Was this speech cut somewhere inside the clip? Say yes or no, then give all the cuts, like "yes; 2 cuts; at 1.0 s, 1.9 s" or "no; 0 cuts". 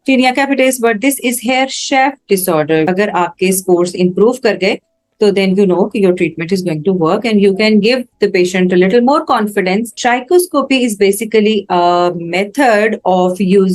yes; 2 cuts; at 2.9 s, 10.0 s